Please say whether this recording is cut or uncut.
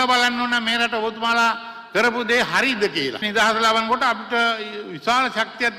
cut